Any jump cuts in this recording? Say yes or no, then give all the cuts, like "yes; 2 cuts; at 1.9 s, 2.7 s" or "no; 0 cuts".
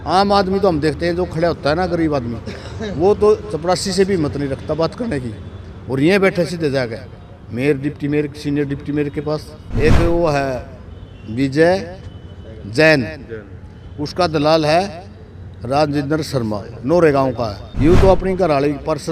yes; 2 cuts; at 9.6 s, 17.6 s